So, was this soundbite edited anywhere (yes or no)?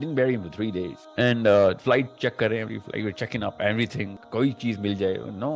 yes